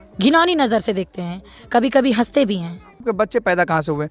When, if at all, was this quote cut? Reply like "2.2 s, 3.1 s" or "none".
3.0 s